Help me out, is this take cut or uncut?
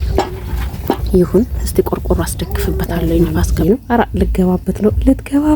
cut